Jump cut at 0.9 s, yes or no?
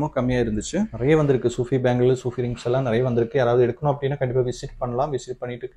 yes